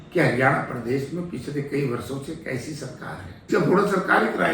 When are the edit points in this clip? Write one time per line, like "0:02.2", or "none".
0:03.5